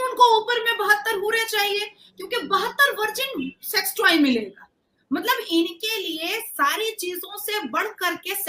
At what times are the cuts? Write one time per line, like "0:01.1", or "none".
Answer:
none